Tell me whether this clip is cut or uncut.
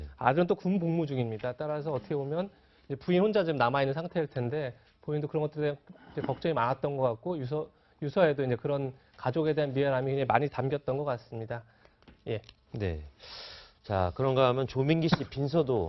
cut